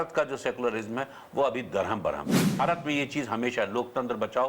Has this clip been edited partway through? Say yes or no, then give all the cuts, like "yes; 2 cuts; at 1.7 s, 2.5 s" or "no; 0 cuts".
yes; 1 cut; at 2.6 s